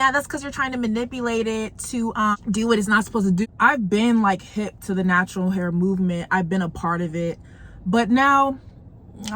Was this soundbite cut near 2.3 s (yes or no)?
yes